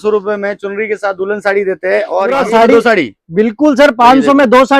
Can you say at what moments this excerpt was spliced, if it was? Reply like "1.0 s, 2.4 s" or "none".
2.3 s